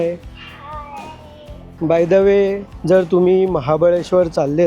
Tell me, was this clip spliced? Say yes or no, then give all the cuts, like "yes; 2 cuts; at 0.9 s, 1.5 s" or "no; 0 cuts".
no; 0 cuts